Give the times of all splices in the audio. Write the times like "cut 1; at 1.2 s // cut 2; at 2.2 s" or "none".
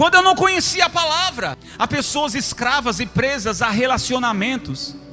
cut 1; at 1.6 s

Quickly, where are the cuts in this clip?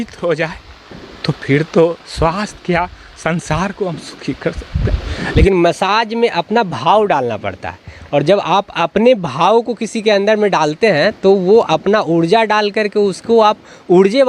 cut 1; at 5.2 s

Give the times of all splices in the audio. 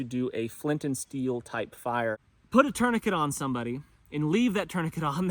cut 1; at 2.3 s

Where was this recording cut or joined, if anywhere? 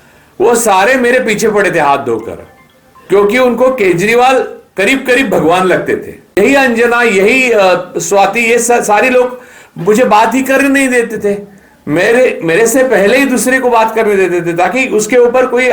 cut 1; at 6.4 s

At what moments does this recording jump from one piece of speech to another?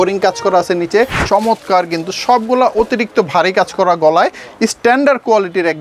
cut 1; at 1.2 s

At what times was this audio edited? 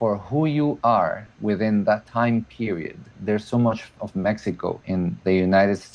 cut 1; at 1.3 s // cut 2; at 2.1 s // cut 3; at 3.2 s // cut 4; at 4.9 s

